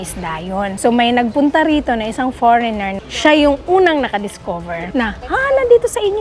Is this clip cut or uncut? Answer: cut